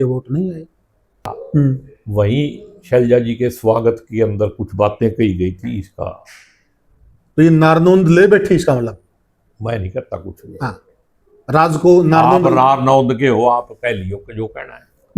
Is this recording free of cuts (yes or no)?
no